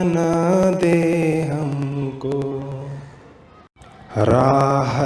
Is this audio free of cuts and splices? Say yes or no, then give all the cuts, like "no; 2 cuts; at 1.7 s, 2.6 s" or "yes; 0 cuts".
no; 1 cut; at 1.1 s